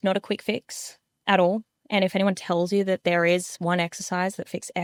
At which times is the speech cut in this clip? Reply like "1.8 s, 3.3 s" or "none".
none